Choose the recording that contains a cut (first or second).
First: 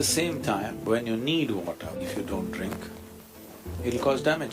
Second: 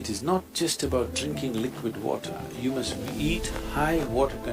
first